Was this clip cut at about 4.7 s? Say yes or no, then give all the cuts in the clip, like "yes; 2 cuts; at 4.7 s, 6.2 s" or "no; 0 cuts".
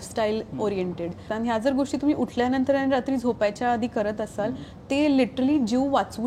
yes; 2 cuts; at 1.2 s, 4.7 s